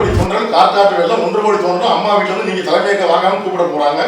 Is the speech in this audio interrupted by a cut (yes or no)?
no